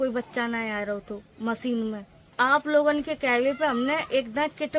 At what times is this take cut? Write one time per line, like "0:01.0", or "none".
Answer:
none